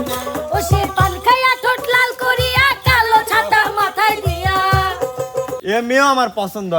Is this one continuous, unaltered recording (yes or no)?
no